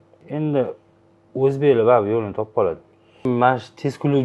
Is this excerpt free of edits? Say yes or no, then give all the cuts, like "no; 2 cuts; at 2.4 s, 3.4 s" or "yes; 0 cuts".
no; 1 cut; at 3.2 s